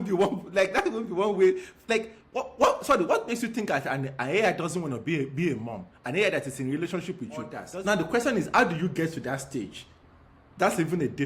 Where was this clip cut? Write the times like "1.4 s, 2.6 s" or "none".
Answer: 7.6 s

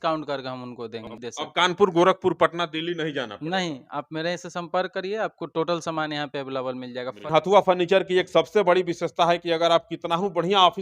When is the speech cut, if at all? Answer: 1.1 s, 7.3 s

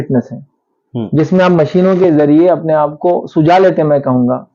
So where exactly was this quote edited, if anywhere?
none

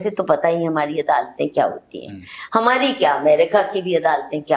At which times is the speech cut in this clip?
none

